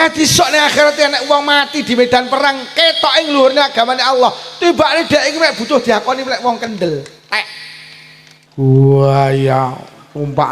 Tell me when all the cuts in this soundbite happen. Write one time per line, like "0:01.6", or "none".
0:08.4